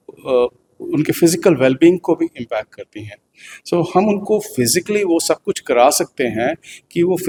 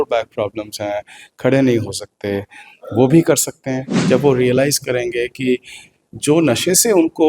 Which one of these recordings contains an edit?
second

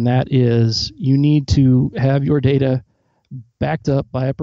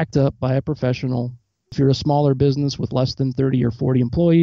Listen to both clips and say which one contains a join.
second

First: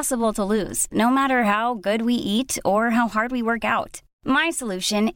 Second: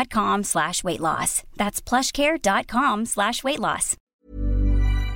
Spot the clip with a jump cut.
second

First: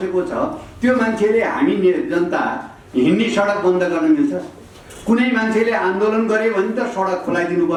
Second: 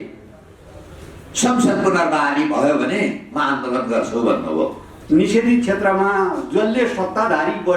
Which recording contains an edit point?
second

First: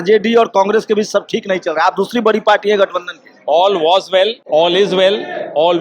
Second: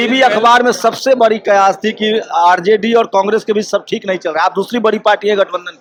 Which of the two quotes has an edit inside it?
first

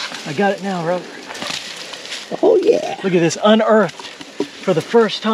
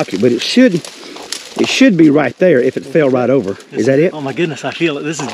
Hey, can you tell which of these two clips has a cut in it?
second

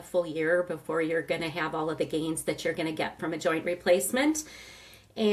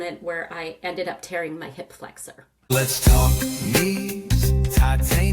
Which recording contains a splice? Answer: second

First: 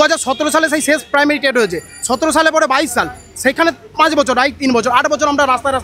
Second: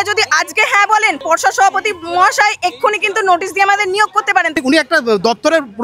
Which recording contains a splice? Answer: second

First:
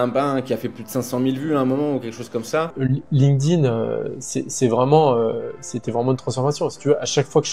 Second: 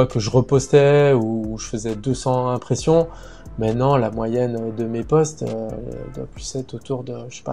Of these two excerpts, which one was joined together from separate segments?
first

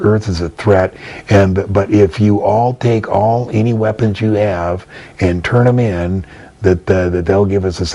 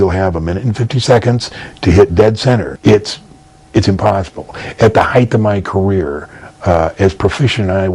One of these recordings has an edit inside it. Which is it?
second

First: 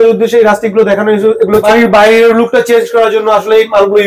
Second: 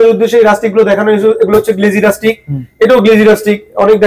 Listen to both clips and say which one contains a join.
first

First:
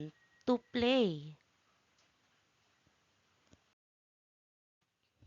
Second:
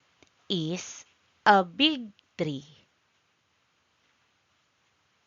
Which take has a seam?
first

